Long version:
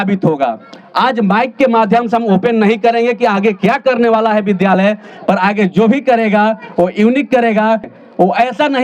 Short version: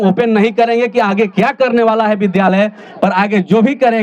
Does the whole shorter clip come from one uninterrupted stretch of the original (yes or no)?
yes